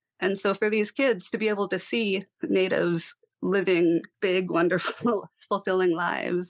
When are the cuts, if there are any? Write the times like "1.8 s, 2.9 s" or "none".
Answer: none